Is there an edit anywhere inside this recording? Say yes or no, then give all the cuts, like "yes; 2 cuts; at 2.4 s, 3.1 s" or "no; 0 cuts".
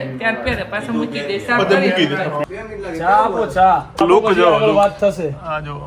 yes; 2 cuts; at 2.5 s, 4.0 s